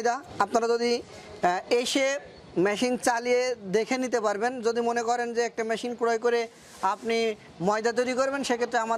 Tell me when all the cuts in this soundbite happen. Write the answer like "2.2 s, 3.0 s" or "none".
none